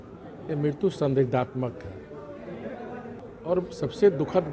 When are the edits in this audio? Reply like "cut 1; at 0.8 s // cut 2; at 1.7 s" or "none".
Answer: cut 1; at 3.2 s